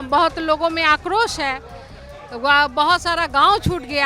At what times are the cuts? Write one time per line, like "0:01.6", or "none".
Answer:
none